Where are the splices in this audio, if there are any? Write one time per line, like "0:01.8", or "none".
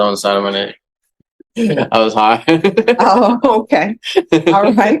0:01.2